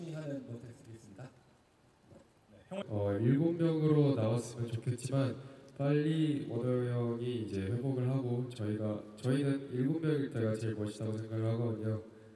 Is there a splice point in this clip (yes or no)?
yes